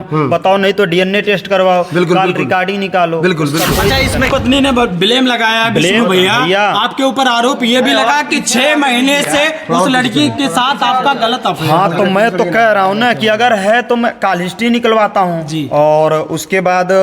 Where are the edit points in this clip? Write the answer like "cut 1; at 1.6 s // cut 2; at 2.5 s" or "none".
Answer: cut 1; at 4.3 s